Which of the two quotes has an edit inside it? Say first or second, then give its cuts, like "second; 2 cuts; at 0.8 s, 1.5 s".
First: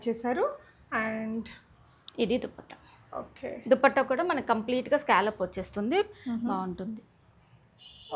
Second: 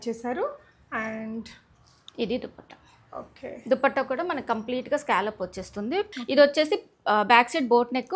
second; 1 cut; at 6.2 s